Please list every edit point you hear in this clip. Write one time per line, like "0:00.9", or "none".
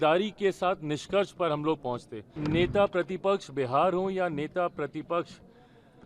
0:02.3